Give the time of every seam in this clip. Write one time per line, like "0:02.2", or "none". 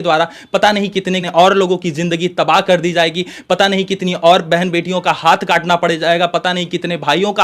0:01.3

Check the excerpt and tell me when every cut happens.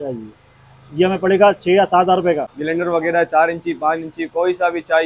0:02.5

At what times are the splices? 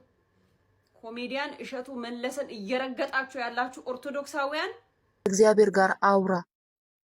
0:05.3

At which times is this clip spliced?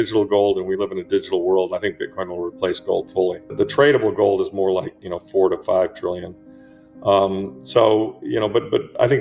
0:03.5

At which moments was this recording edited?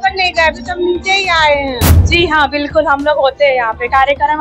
0:01.9

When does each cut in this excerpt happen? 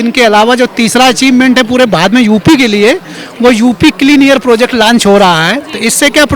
none

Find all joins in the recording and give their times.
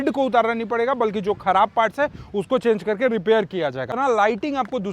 0:03.9

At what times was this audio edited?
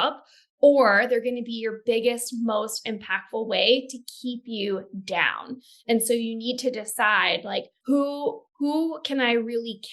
0:07.7

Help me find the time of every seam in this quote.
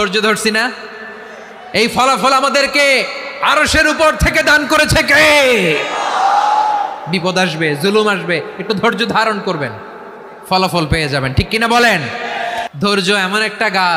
0:12.7

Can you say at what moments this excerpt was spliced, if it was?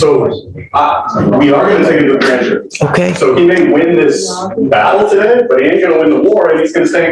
none

